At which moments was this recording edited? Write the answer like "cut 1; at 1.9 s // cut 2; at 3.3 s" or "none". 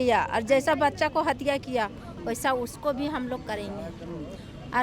none